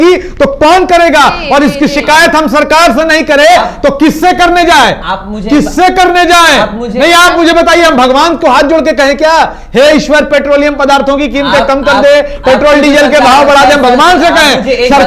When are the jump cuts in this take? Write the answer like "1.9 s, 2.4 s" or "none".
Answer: none

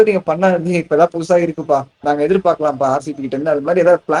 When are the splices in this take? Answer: none

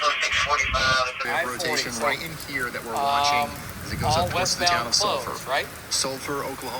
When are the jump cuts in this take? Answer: 1.2 s

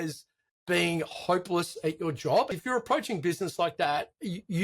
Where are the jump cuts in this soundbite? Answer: 2.6 s

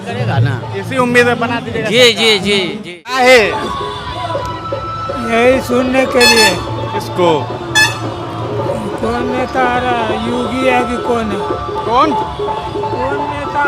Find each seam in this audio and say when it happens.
3.1 s

